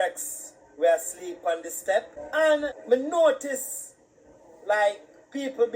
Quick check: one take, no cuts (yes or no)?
no